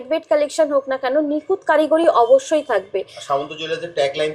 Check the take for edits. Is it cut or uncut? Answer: uncut